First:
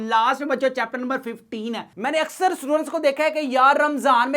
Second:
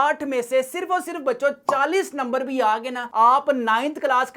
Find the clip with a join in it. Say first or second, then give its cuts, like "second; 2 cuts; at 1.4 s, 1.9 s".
first; 1 cut; at 1.9 s